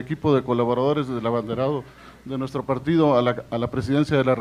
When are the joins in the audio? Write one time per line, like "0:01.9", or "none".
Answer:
0:02.5

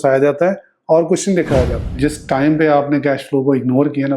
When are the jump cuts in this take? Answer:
0:01.9

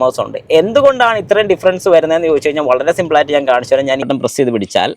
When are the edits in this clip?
0:04.1

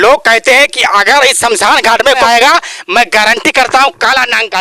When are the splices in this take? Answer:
0:02.2

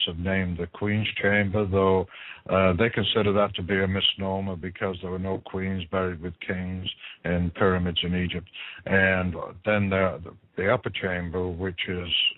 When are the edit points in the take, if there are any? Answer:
none

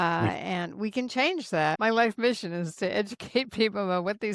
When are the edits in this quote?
0:01.8

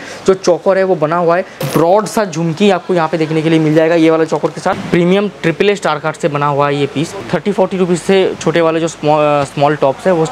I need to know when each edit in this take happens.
0:01.6
0:04.8
0:07.2

